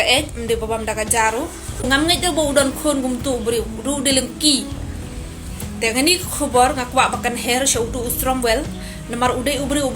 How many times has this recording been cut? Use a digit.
1